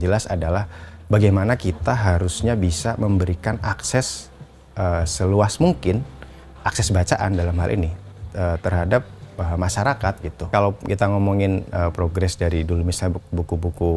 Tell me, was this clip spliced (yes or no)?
yes